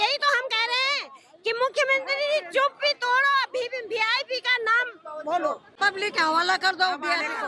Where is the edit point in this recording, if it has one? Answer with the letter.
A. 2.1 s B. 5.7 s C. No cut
B